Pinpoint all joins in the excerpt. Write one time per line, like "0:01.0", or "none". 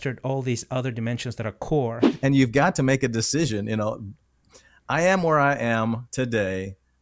0:02.1